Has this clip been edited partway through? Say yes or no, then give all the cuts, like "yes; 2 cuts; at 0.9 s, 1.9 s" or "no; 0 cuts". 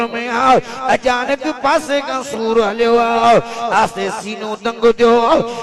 no; 0 cuts